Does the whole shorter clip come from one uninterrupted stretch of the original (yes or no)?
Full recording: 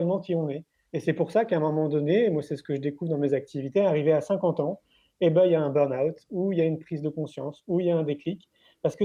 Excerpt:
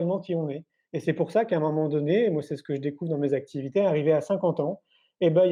yes